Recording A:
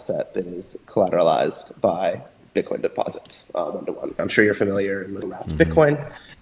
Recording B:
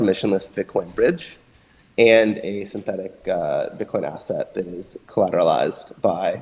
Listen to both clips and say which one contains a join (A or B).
A